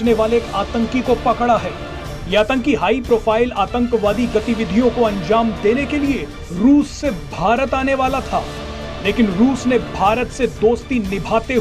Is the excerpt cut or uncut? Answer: uncut